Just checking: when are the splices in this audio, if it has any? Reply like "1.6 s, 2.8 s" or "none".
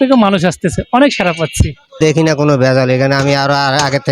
2.0 s